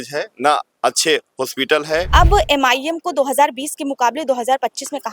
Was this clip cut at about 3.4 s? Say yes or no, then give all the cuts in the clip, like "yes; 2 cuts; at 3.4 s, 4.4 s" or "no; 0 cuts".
no; 1 cut; at 2.1 s